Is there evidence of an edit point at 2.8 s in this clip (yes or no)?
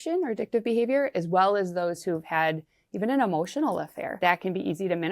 no